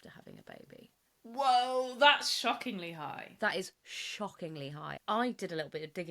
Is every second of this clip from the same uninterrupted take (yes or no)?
no